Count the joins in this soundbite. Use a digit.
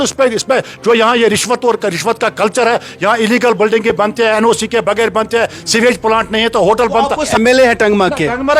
1